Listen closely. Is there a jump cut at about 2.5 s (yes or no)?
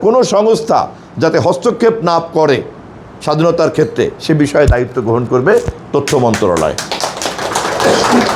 no